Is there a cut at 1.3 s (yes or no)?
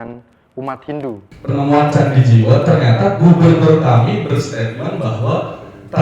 yes